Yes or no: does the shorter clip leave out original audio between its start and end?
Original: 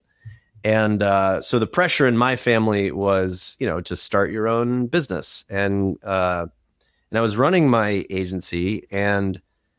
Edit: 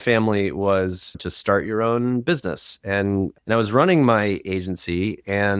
yes